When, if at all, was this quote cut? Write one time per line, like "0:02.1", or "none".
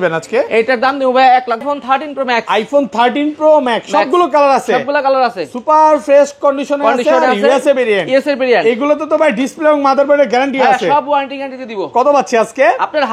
0:01.6